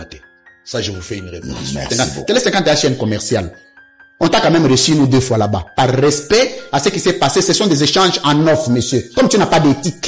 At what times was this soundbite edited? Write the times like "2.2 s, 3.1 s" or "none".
2.1 s